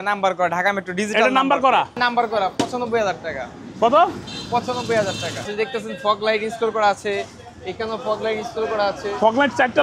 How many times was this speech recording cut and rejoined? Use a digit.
2